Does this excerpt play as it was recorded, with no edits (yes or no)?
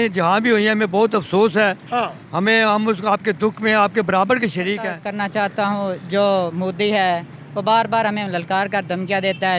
no